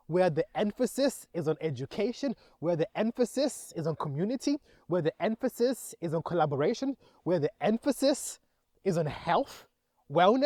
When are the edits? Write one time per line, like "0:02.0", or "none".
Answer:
none